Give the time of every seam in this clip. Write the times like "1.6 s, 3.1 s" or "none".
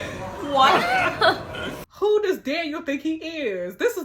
1.8 s